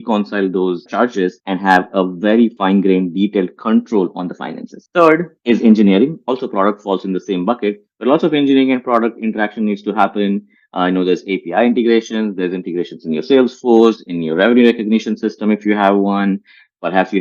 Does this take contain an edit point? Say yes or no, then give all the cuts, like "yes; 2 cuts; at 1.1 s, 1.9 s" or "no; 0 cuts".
yes; 4 cuts; at 1.0 s, 2.6 s, 5.3 s, 6.2 s